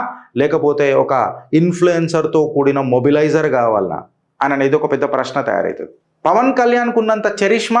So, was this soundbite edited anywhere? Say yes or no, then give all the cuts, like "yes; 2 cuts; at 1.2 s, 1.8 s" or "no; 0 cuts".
yes; 1 cut; at 6.0 s